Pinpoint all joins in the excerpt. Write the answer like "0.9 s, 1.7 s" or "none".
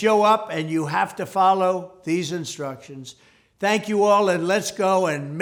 none